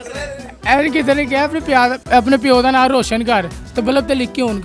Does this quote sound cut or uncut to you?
uncut